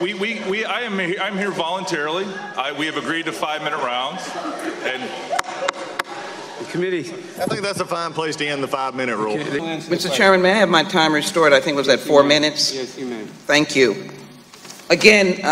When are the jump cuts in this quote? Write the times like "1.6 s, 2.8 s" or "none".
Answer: 9.6 s